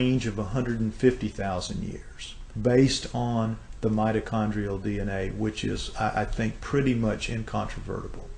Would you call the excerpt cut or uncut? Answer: cut